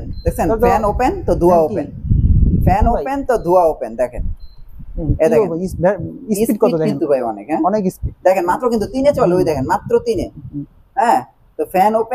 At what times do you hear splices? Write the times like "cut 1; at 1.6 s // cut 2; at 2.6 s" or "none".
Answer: none